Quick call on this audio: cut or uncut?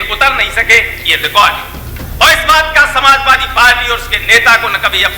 uncut